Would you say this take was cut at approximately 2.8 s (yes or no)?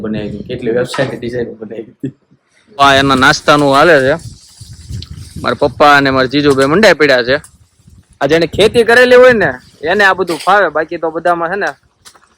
yes